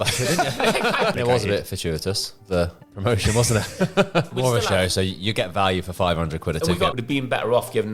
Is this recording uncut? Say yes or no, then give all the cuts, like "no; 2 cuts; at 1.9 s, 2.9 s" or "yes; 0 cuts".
no; 3 cuts; at 1.1 s, 4.3 s, 6.9 s